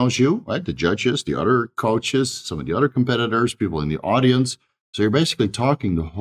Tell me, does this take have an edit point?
no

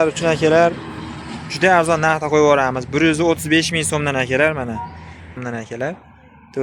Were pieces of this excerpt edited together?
yes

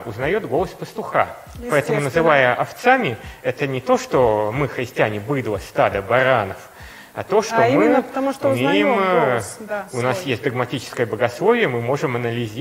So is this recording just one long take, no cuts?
yes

